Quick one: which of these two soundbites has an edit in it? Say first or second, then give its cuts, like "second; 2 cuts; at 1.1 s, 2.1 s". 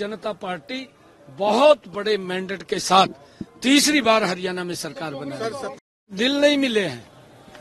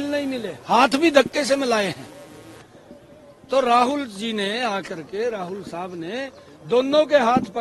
first; 1 cut; at 6.1 s